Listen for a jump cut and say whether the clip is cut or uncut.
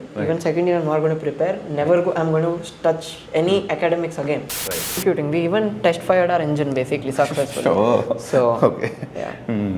cut